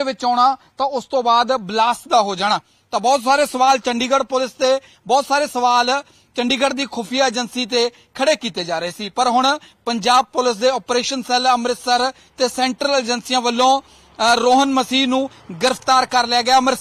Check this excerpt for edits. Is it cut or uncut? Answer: uncut